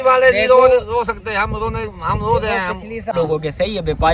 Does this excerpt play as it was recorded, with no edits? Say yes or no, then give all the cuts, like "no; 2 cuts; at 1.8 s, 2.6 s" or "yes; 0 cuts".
no; 1 cut; at 3.1 s